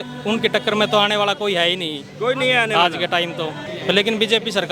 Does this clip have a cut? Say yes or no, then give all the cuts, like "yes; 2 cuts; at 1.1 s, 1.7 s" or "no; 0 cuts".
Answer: yes; 1 cut; at 3.7 s